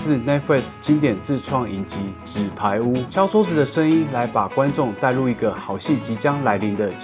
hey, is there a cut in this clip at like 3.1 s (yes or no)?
yes